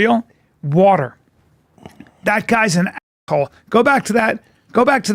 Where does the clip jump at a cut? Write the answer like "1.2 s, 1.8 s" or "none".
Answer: none